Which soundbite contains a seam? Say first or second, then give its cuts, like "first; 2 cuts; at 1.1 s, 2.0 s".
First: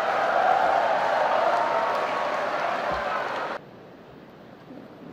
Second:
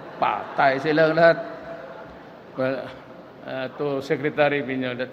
first; 1 cut; at 3.6 s